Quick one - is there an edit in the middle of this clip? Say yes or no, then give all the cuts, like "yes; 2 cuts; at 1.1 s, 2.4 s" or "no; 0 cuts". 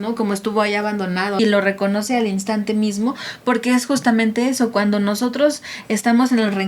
yes; 1 cut; at 1.4 s